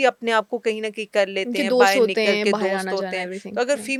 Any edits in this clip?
no; 0 cuts

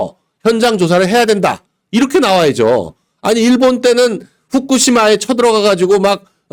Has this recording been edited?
no; 0 cuts

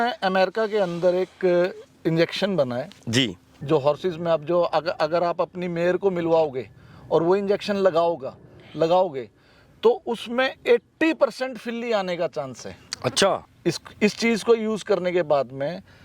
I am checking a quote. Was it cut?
yes; 2 cuts; at 3.5 s, 13.5 s

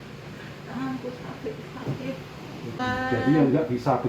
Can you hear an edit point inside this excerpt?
yes; 1 cut; at 2.8 s

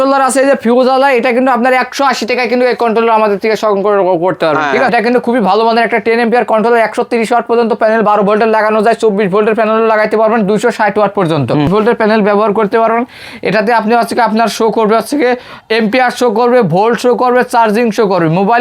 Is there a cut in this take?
yes; 2 cuts; at 4.9 s, 11.7 s

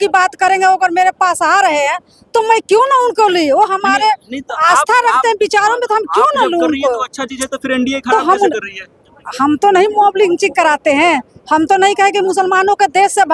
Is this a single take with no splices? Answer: yes; 0 cuts

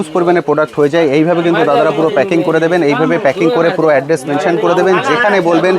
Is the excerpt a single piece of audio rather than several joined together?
yes; 0 cuts

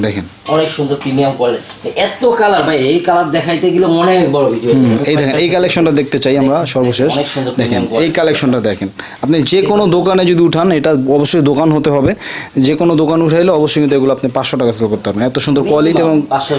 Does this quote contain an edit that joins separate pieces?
no; 0 cuts

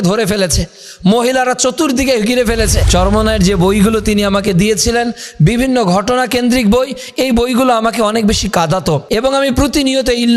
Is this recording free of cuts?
no; 2 cuts; at 2.8 s, 9.0 s

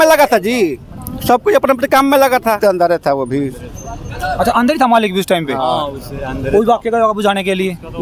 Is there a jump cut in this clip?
yes; 1 cut; at 2.6 s

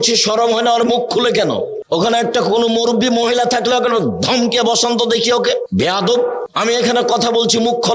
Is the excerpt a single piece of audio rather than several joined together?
no; 3 cuts; at 1.8 s, 5.7 s, 6.5 s

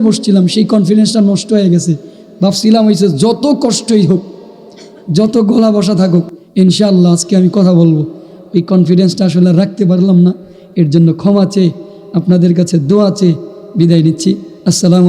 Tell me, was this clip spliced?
no; 0 cuts

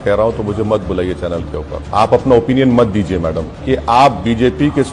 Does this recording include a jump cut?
yes; 2 cuts; at 1.8 s, 3.5 s

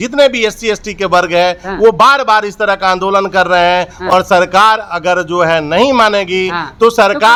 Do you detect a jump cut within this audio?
no; 0 cuts

